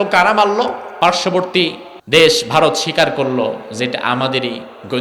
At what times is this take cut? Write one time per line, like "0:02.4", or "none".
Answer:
0:00.9
0:01.9

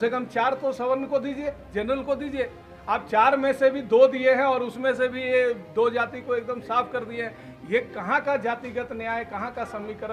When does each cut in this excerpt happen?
none

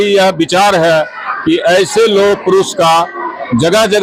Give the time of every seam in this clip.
none

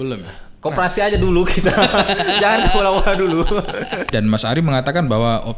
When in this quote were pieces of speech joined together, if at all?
0:04.1

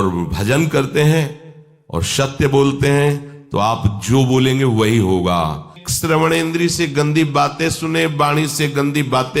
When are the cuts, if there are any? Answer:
0:05.8

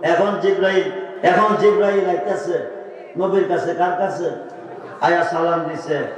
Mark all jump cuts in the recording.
0:01.1

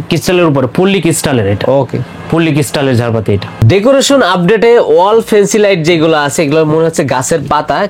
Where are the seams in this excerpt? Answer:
none

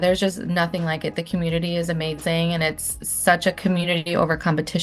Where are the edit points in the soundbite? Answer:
none

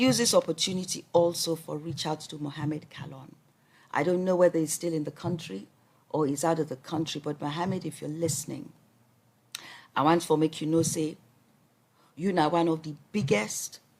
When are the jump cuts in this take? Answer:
none

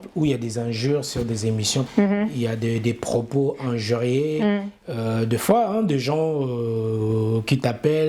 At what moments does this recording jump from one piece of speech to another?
0:01.9

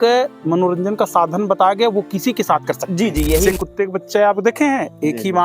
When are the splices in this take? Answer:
0:03.5

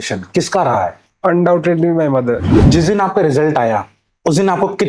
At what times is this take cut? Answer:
0:02.4

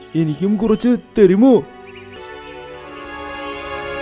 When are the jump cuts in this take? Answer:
0:02.2

